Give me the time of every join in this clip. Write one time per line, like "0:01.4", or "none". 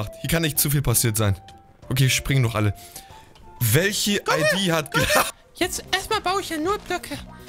0:05.3